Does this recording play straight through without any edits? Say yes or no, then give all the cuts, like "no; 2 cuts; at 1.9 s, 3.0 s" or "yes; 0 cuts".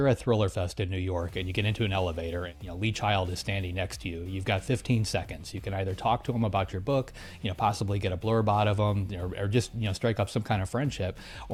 yes; 0 cuts